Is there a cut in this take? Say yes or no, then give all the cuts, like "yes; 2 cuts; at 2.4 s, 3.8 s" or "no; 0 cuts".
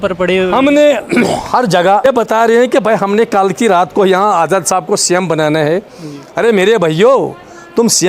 yes; 1 cut; at 2.0 s